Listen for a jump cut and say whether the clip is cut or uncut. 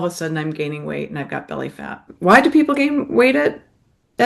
cut